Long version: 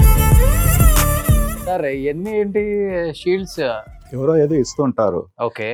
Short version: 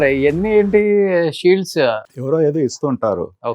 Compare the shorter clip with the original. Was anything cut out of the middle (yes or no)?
yes